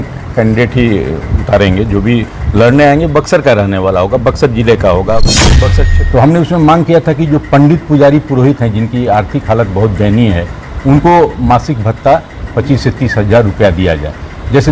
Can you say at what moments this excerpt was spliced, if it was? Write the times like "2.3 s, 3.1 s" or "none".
5.6 s